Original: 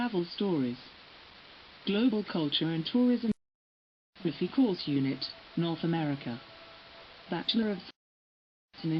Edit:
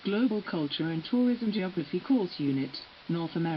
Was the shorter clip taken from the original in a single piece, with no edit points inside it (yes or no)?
no